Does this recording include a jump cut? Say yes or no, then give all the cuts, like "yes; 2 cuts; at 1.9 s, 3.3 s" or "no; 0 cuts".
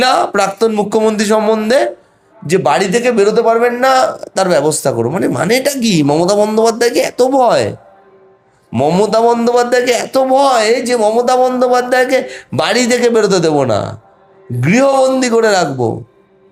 no; 0 cuts